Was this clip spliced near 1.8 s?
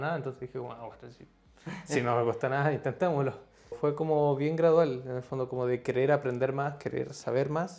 no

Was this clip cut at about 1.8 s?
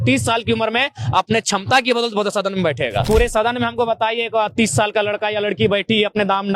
no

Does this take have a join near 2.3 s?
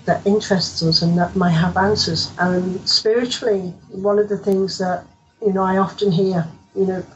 yes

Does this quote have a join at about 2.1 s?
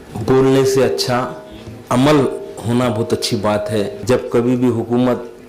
no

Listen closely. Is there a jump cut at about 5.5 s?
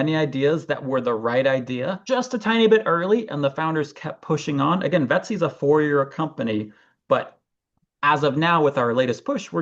no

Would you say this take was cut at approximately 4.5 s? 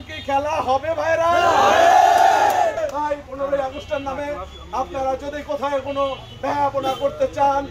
no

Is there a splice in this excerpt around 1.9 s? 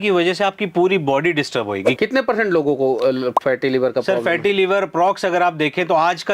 yes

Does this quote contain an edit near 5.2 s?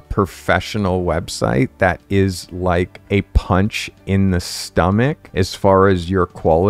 yes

